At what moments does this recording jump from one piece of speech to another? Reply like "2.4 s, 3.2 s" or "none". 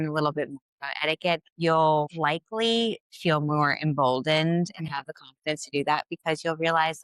1.5 s, 2.1 s